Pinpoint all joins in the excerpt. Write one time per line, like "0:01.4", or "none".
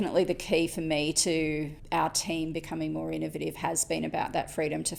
none